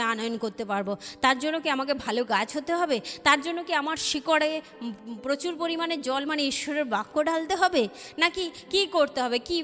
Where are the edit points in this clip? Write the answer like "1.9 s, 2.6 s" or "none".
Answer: none